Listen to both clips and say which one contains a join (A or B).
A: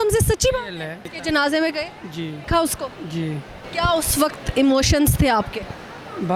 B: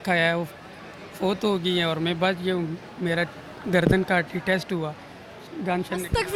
A